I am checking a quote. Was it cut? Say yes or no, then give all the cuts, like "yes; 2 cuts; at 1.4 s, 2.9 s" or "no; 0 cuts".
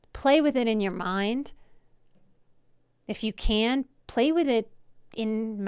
no; 0 cuts